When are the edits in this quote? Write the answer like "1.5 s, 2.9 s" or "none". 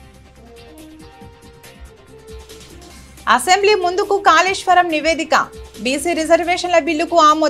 none